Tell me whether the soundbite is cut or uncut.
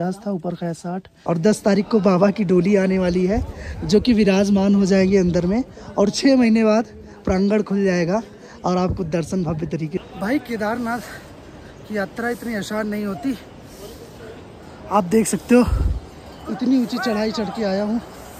cut